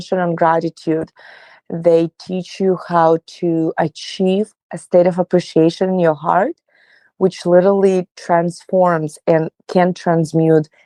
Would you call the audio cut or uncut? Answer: uncut